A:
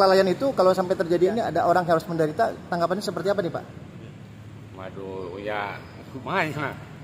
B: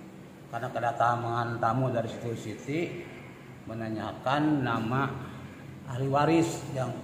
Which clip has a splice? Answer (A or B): A